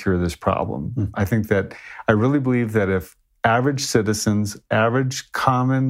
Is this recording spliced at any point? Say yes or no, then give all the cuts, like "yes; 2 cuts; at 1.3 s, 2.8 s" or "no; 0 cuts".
no; 0 cuts